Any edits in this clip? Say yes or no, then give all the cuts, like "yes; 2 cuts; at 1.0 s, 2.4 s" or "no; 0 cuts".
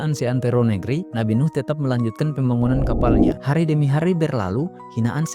yes; 2 cuts; at 1.1 s, 3.4 s